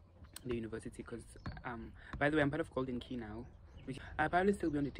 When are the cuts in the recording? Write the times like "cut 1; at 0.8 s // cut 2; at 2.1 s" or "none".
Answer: cut 1; at 3.9 s